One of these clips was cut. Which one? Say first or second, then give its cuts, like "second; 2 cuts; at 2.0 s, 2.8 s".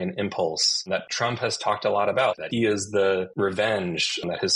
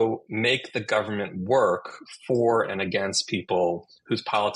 first; 3 cuts; at 1.0 s, 2.4 s, 3.3 s